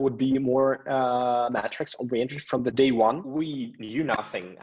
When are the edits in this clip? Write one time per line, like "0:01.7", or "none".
0:03.2